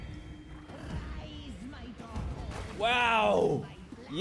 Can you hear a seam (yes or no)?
no